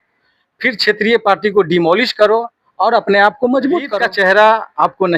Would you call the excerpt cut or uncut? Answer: cut